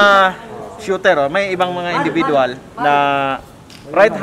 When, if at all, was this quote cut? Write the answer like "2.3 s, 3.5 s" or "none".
2.6 s